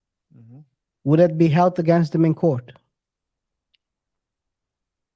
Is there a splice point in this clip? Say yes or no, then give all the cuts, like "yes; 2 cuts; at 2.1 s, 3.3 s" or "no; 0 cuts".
no; 0 cuts